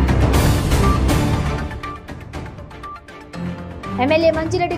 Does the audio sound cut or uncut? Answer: uncut